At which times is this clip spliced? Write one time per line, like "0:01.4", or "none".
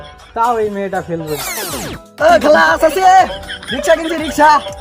0:01.5